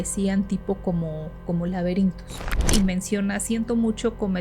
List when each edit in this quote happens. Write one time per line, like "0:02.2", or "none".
0:02.7